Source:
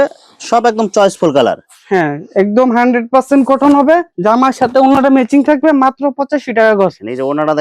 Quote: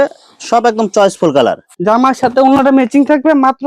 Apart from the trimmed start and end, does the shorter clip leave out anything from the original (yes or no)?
yes